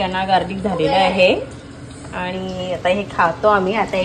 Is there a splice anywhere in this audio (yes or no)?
no